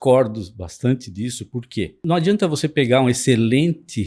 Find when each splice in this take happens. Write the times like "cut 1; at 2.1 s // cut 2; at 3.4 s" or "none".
cut 1; at 2.0 s